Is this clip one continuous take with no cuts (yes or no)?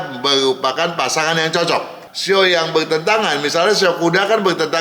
no